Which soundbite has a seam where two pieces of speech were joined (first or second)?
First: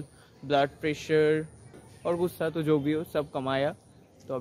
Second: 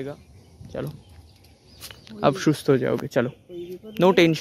first